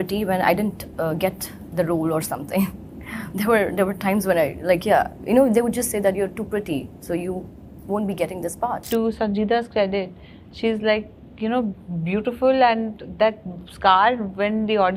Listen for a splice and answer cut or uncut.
cut